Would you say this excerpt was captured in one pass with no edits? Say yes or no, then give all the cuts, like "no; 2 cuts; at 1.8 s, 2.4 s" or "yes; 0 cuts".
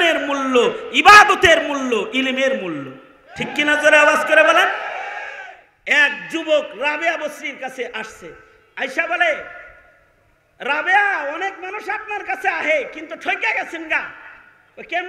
no; 1 cut; at 5.6 s